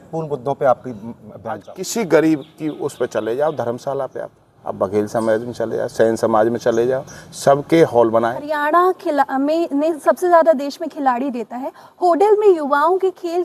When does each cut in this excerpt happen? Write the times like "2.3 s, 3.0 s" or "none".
1.8 s, 8.5 s